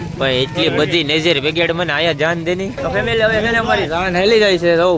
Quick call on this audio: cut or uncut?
cut